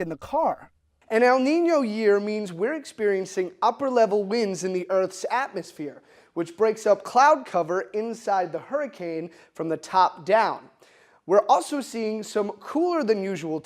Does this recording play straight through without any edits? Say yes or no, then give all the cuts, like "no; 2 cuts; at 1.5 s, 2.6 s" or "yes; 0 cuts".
no; 1 cut; at 0.9 s